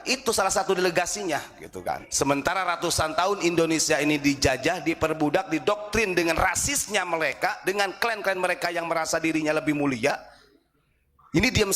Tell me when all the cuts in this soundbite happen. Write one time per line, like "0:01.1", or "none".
0:02.1